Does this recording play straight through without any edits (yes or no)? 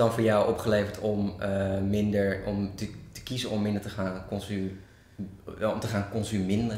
yes